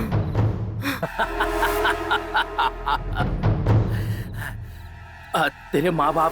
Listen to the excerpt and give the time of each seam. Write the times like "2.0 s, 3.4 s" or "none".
1.0 s

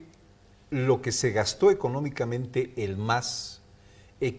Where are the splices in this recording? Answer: none

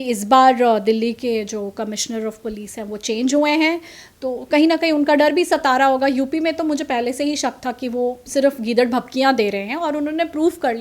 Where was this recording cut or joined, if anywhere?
8.3 s

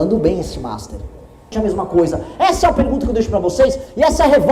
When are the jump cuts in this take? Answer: 1.5 s

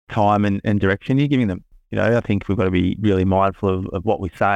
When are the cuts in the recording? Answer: none

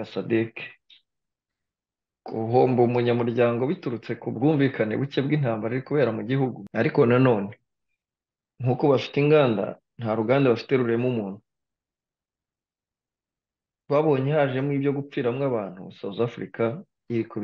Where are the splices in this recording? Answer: 6.6 s

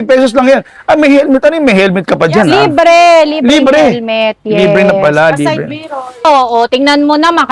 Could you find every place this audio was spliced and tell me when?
6.2 s

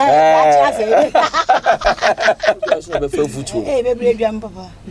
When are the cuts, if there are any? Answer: 3.0 s

